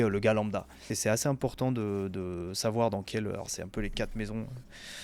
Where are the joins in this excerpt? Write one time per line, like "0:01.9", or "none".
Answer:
0:00.9

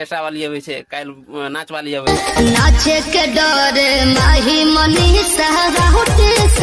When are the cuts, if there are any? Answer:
none

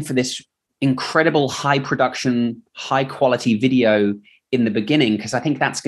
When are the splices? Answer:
none

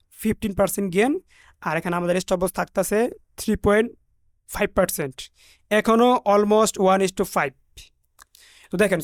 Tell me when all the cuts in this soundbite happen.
none

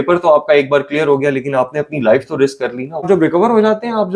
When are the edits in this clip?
0:03.0

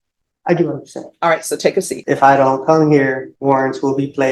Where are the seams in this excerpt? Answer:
0:02.0
0:03.3

